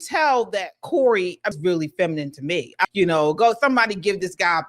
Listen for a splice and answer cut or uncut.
cut